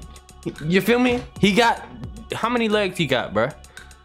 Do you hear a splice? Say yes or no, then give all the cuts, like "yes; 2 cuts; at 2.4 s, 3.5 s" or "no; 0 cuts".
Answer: no; 0 cuts